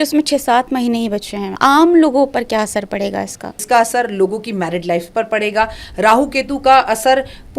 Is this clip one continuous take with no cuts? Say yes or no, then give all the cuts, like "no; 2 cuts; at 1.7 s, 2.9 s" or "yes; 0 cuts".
no; 2 cuts; at 1.5 s, 3.5 s